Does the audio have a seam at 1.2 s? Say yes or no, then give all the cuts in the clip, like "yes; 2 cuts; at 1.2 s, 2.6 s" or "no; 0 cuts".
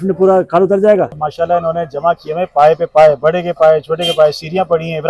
yes; 1 cut; at 1.2 s